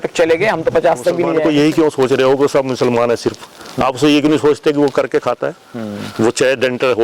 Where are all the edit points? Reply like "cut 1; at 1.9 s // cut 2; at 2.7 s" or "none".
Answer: cut 1; at 1.3 s